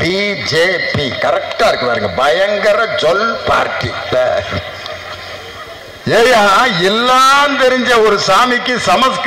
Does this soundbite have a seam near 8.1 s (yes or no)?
no